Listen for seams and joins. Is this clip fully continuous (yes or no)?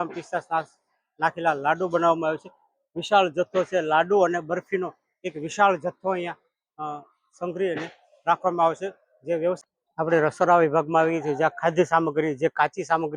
no